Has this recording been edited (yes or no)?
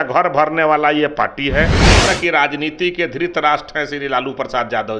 yes